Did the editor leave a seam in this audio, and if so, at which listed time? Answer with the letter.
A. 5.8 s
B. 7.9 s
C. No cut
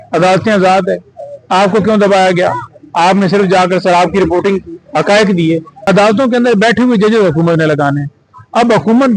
A